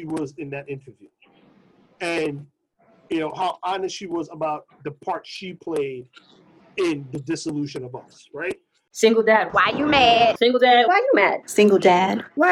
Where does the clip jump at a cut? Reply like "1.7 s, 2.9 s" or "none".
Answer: 8.9 s